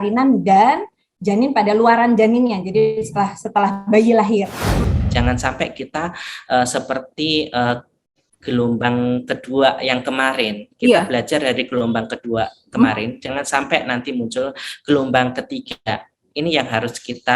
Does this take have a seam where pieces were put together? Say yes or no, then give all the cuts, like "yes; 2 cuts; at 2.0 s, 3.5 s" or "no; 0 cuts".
yes; 1 cut; at 4.7 s